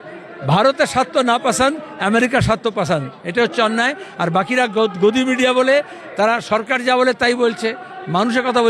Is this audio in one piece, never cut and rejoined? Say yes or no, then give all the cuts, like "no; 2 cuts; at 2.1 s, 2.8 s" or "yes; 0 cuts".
yes; 0 cuts